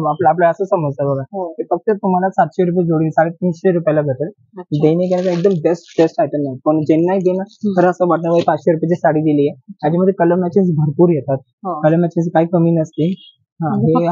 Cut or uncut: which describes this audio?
uncut